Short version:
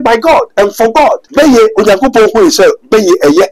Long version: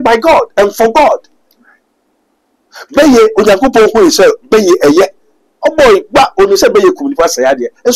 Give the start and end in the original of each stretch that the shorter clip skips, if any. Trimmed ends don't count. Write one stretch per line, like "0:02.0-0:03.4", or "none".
0:01.2-0:02.8

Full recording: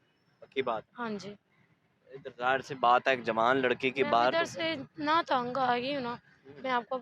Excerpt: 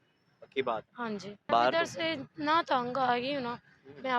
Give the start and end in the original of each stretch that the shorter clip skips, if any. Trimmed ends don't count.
0:01.5-0:04.1

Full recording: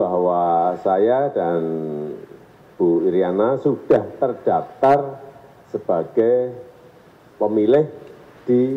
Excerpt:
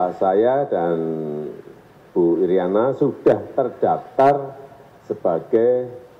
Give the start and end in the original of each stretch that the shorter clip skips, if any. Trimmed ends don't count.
none

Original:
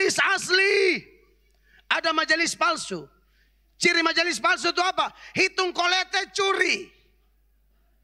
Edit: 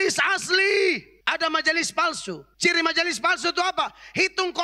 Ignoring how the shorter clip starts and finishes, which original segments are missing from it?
0:01.1-0:01.8
0:03.1-0:03.7

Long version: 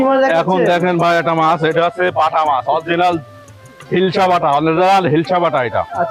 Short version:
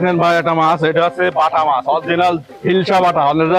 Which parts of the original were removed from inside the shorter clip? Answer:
0:03.3-0:03.8

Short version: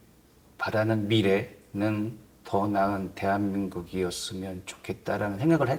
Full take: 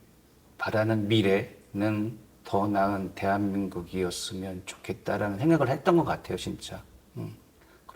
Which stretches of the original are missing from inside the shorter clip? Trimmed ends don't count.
none

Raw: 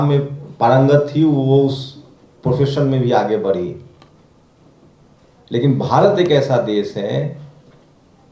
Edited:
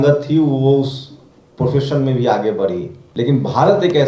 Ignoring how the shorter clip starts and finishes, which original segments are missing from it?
0:03.8-0:05.3

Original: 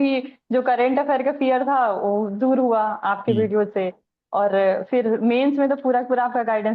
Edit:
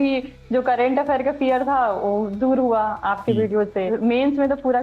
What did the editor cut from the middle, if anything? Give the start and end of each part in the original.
0:03.9-0:05.1

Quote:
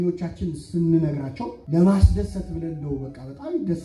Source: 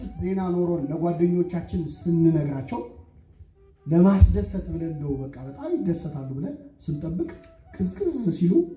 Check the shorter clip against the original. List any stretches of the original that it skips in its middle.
0:02.8-0:03.7

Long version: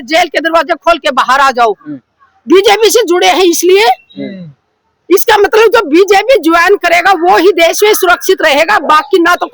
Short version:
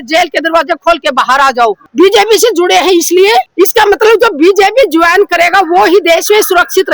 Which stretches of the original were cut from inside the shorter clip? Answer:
0:01.8-0:02.4
0:04.0-0:05.0

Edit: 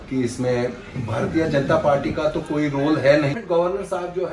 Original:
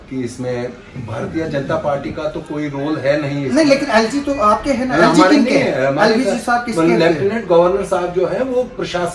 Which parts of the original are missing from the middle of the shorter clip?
0:03.3-0:07.3

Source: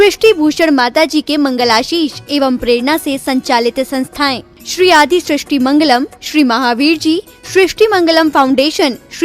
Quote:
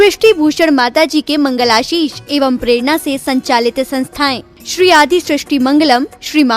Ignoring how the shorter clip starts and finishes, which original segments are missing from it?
none

